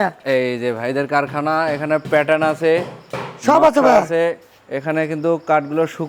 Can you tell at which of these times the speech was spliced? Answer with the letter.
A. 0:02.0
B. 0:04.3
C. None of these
C